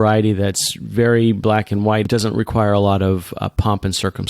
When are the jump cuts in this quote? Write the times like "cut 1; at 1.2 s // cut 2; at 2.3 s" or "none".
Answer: cut 1; at 2.1 s